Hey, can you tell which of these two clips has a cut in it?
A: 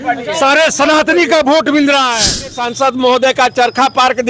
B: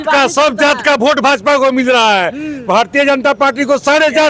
A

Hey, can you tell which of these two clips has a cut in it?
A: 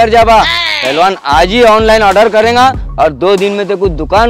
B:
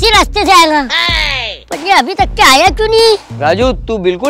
B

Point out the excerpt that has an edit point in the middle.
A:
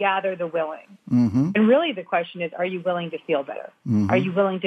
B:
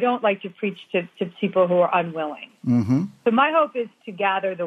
A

